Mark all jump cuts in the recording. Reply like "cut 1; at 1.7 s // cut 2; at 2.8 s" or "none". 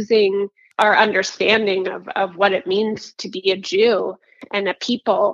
cut 1; at 4.4 s